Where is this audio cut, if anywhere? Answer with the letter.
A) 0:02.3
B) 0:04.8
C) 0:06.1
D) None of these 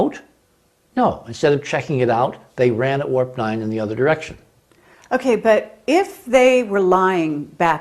D